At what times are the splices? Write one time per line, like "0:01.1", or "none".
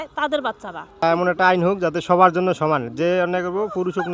0:01.0